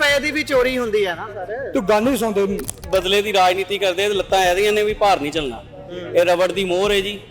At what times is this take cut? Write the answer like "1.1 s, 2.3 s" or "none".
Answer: 2.8 s